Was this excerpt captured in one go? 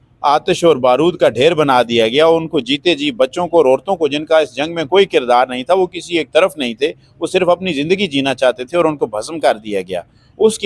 yes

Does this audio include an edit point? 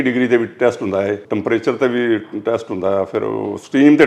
yes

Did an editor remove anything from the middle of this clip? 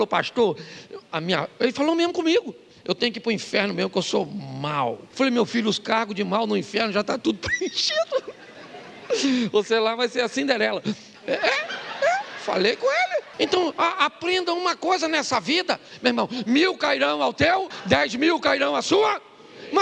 yes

